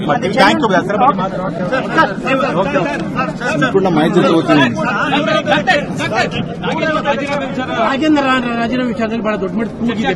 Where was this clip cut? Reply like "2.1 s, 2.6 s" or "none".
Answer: none